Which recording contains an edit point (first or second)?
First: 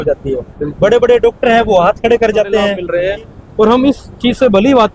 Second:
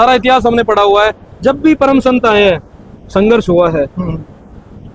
first